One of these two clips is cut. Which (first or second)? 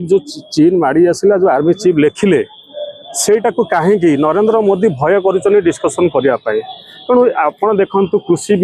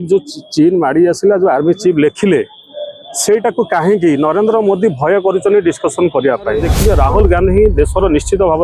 second